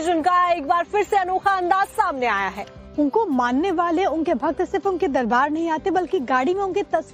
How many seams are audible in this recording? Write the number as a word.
one